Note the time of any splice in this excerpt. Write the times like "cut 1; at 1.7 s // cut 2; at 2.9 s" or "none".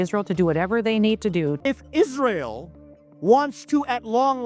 cut 1; at 1.6 s